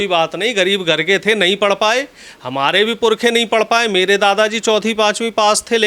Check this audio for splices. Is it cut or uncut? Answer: uncut